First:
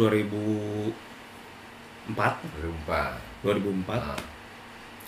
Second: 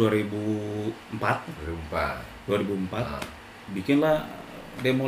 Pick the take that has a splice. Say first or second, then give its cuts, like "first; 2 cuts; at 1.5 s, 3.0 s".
second; 2 cuts; at 1.0 s, 3.7 s